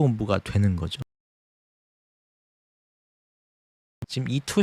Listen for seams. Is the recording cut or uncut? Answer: uncut